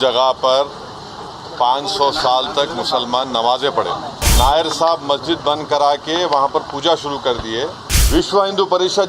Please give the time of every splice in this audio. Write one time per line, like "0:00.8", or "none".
0:04.2
0:07.9